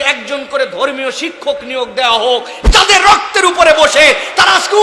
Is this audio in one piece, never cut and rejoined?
no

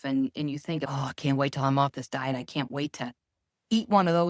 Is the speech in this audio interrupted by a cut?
yes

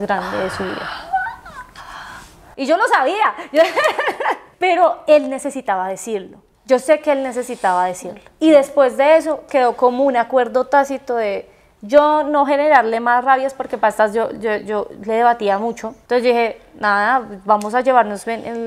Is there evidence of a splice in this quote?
no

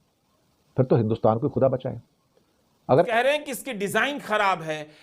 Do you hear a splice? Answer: yes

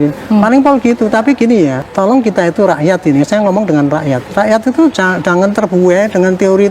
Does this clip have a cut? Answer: yes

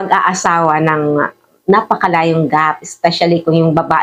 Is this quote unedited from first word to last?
yes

